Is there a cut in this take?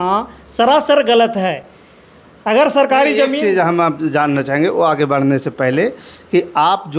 no; 0 cuts

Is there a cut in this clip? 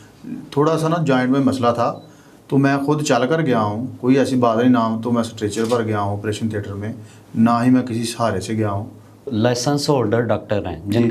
yes; 1 cut; at 9.3 s

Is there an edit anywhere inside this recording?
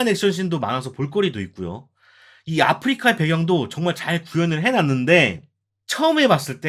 no; 0 cuts

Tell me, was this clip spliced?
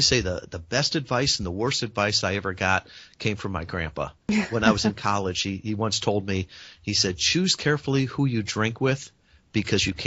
no; 0 cuts

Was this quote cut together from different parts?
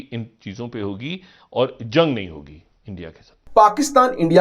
yes; 1 cut; at 3.3 s

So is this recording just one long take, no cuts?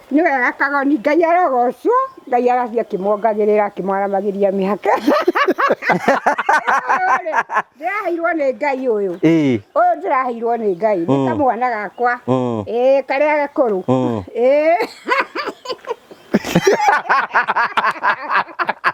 yes; 0 cuts

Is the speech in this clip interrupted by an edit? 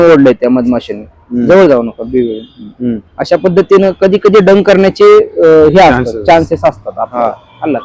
no; 0 cuts

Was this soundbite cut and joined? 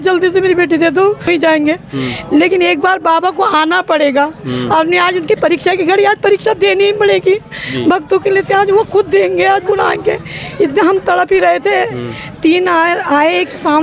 yes; 1 cut; at 1.3 s

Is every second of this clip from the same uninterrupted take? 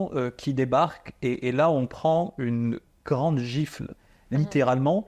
yes; 0 cuts

